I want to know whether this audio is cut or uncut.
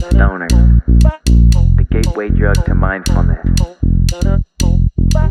uncut